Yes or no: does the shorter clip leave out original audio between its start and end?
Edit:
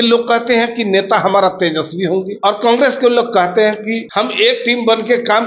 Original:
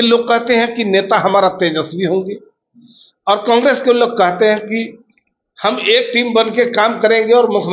yes